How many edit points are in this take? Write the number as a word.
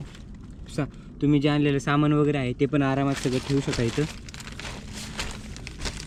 zero